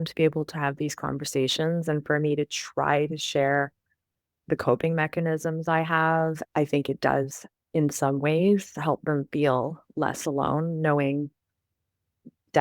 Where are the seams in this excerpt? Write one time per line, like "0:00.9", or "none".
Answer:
0:06.4